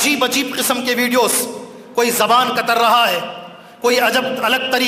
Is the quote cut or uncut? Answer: uncut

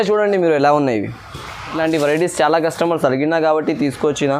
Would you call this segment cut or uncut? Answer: cut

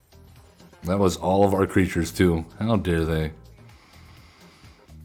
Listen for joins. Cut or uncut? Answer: uncut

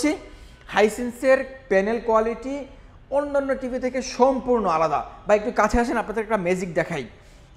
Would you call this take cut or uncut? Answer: uncut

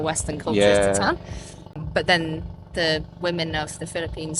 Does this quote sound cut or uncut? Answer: cut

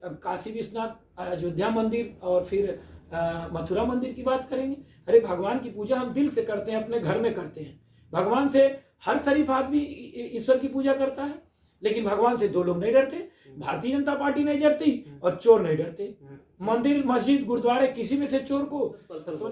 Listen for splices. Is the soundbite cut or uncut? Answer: uncut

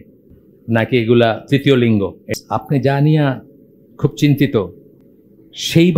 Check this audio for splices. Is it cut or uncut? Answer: cut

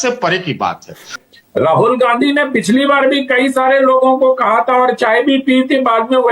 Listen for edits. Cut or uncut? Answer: cut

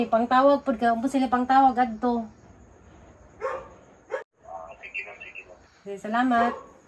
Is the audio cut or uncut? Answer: cut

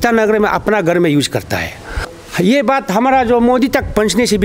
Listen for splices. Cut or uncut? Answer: cut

